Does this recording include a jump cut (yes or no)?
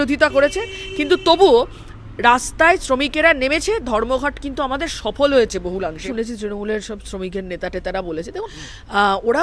yes